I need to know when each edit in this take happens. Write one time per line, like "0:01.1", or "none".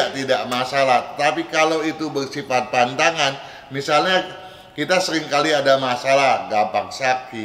none